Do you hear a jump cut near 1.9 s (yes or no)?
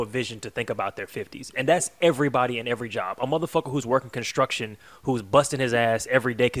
no